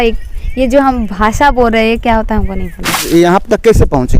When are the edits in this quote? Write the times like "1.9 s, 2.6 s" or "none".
3.0 s